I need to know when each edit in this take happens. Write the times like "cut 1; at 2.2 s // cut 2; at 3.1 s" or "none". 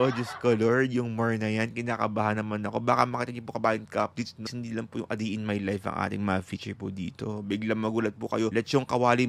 cut 1; at 4.5 s // cut 2; at 8.5 s

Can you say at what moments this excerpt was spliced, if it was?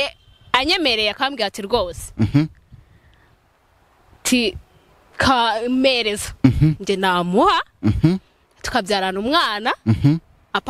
none

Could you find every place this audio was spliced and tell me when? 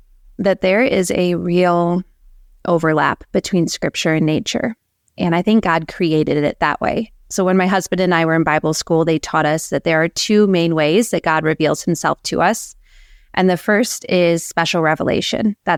none

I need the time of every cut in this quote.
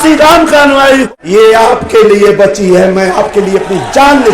cut 1; at 1.1 s

